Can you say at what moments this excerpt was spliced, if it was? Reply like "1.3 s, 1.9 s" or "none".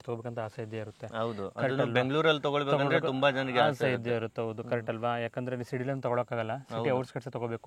none